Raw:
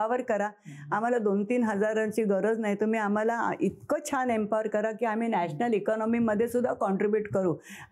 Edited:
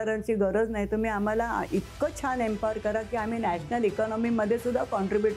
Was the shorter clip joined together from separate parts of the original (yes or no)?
no